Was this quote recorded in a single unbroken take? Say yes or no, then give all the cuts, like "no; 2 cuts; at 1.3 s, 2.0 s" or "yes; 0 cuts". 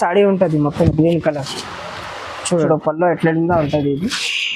no; 1 cut; at 2.6 s